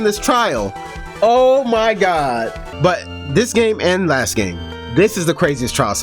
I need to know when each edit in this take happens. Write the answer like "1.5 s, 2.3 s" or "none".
2.6 s